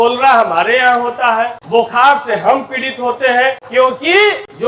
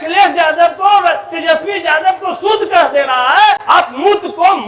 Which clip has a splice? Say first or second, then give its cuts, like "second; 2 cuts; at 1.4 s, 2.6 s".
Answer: second; 1 cut; at 3.6 s